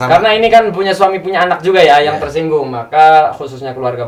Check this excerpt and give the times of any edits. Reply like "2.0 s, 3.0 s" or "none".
none